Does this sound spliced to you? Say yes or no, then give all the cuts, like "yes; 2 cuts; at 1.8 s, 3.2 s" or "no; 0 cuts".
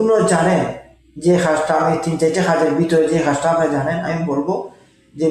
no; 0 cuts